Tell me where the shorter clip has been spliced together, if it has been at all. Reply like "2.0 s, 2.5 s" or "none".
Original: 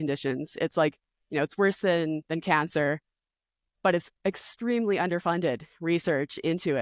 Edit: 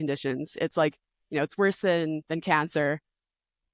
none